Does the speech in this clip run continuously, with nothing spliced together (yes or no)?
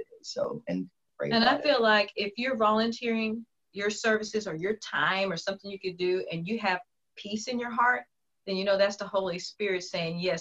no